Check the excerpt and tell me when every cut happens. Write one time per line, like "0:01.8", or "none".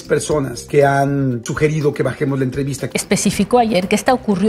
0:01.4
0:02.8